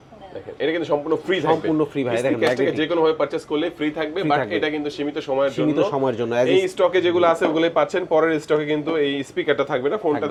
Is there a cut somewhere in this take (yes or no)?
no